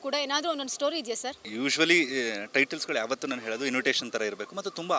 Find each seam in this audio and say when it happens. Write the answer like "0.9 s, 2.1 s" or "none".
1.5 s

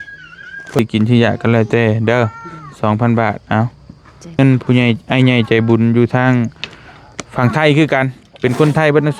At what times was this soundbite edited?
0.8 s, 4.4 s

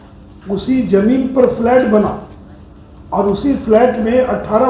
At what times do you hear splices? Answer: none

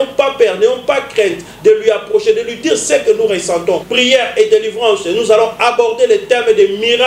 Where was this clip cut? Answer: 3.9 s

